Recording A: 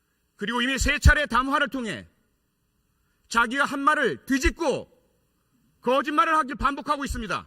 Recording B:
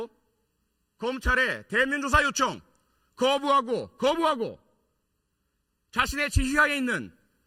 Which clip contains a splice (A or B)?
A